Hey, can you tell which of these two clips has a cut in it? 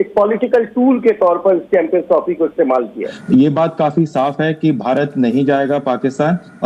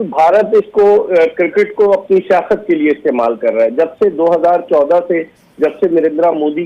first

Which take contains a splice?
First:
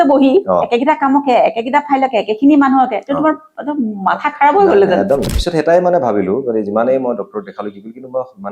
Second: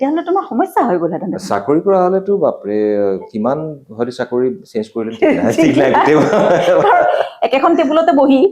first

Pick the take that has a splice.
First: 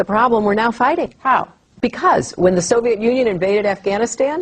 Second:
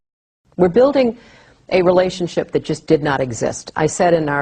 second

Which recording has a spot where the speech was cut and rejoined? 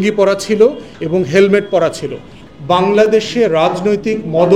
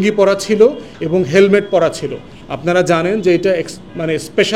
first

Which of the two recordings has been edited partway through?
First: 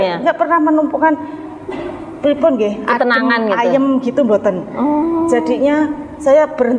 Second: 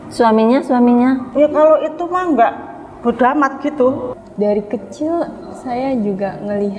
second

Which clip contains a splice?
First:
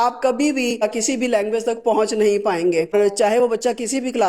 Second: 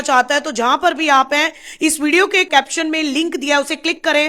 first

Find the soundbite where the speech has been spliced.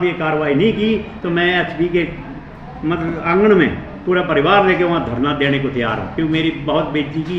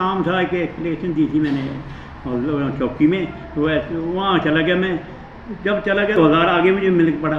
second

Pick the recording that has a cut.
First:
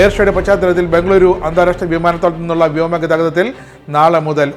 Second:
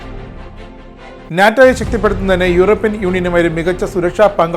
second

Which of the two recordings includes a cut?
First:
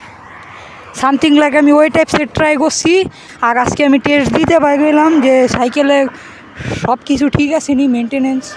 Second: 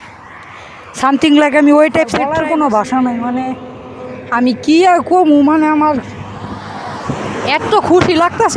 second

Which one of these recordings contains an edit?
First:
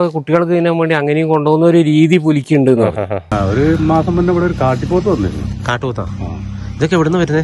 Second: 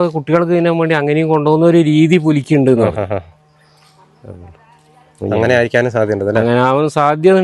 first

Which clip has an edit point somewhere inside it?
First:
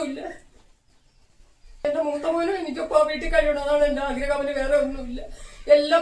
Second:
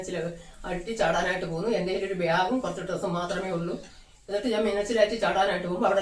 first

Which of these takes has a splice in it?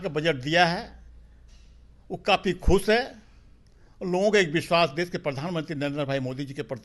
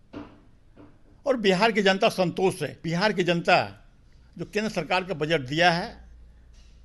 second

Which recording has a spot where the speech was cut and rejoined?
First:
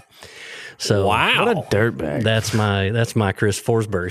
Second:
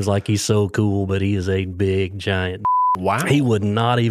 second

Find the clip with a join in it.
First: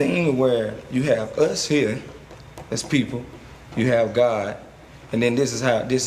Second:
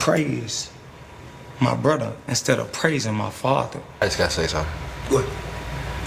second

